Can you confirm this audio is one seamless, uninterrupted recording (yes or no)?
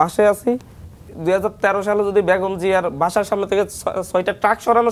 no